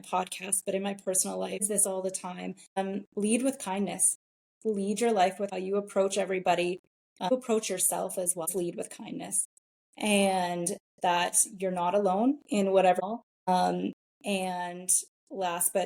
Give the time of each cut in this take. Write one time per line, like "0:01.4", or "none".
0:01.6
0:02.8
0:05.5
0:07.3
0:08.5
0:13.0